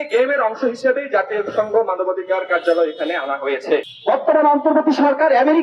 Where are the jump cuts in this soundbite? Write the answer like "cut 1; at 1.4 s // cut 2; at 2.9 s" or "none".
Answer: cut 1; at 3.9 s